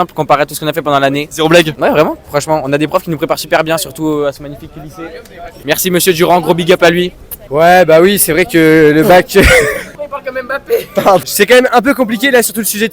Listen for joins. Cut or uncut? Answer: uncut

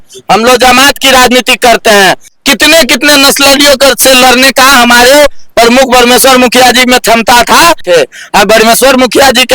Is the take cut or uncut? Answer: cut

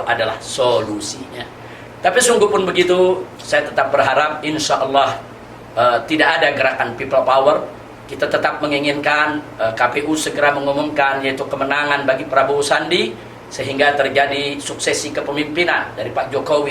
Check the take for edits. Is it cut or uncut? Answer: uncut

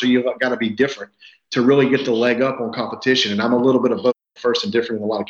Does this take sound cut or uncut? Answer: uncut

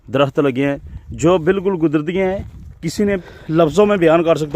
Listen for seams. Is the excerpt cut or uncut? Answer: cut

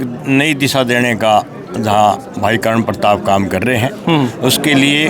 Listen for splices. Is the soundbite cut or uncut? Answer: uncut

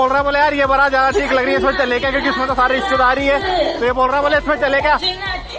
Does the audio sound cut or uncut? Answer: uncut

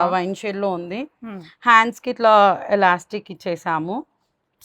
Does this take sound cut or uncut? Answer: uncut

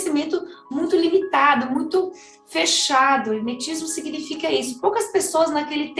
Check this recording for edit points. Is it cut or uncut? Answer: uncut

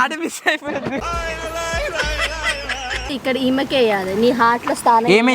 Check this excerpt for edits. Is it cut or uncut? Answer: cut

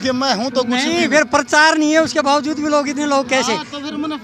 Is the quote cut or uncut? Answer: uncut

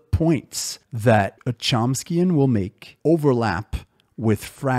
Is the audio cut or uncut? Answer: uncut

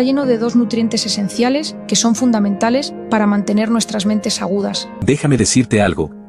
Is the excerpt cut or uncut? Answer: cut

